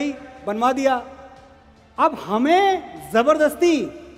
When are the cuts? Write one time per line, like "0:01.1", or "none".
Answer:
none